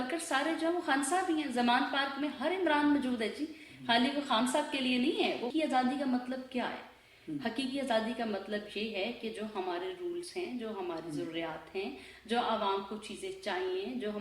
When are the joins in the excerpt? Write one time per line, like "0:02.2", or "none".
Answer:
0:05.5